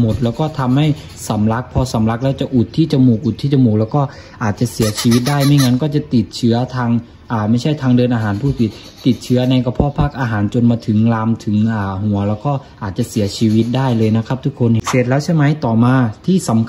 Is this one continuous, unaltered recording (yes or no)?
no